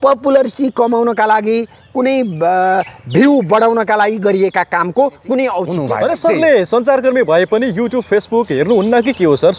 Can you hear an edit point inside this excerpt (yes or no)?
yes